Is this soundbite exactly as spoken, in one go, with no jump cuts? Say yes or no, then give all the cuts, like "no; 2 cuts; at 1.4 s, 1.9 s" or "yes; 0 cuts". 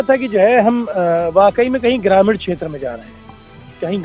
yes; 0 cuts